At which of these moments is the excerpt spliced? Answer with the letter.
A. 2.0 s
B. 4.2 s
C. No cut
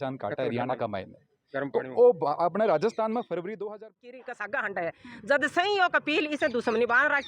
B